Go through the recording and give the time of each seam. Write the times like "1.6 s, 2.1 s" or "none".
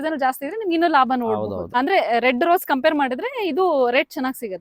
1.7 s